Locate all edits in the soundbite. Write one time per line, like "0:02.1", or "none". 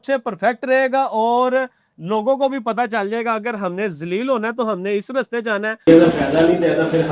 0:05.9